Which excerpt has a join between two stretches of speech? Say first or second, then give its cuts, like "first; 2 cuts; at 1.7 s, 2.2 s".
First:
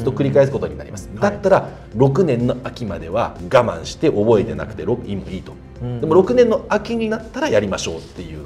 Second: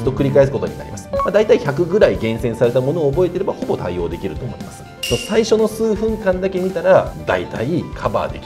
second; 3 cuts; at 1.1 s, 5.0 s, 7.6 s